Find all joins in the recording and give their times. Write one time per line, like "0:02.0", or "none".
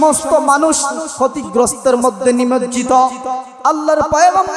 0:01.0
0:03.4